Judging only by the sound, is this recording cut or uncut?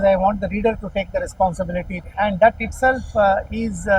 cut